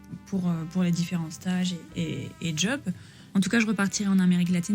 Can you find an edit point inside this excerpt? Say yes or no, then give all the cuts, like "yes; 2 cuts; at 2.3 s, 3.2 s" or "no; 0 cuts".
yes; 1 cut; at 3.1 s